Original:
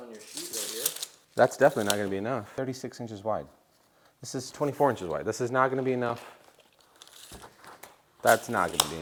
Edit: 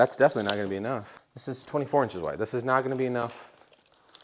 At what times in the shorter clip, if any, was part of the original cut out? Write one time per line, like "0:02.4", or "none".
0:01.1